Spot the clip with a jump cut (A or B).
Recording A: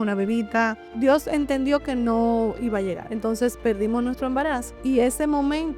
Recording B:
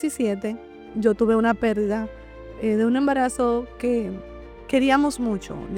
A